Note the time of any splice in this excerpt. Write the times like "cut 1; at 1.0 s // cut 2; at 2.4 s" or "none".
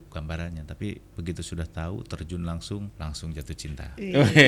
cut 1; at 2.9 s